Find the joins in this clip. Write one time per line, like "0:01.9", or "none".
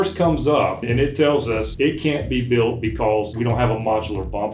0:00.8
0:01.7
0:03.3